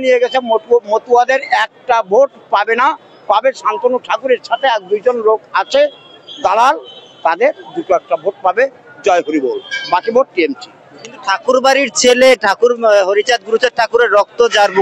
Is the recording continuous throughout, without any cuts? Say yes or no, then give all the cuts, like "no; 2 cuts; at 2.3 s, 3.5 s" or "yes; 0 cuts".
yes; 0 cuts